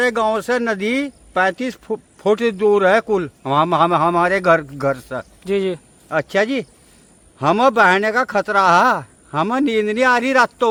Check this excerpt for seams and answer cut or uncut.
uncut